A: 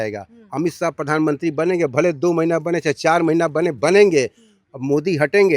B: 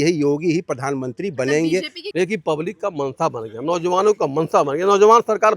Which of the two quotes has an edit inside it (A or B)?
B